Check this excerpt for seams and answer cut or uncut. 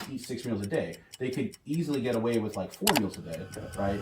uncut